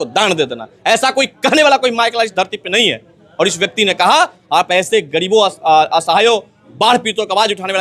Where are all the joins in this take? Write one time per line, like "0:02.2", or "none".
none